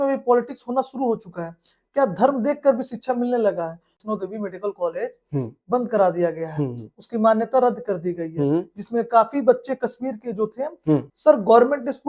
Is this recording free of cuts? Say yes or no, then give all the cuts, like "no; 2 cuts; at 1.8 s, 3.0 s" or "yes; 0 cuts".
no; 2 cuts; at 3.9 s, 11.1 s